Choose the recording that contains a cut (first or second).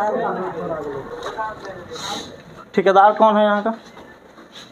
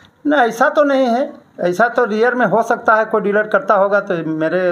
first